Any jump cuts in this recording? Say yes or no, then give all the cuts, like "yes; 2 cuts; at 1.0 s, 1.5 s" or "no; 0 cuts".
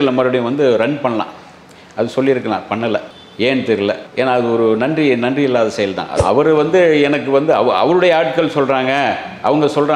yes; 1 cut; at 6.0 s